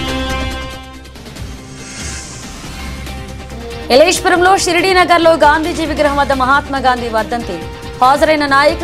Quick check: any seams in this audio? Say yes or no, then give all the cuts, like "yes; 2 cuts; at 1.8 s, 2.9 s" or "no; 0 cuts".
yes; 2 cuts; at 1.6 s, 3.3 s